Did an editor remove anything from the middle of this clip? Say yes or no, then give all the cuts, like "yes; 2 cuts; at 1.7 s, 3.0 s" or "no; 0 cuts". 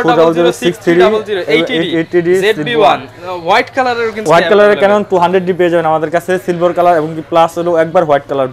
no; 0 cuts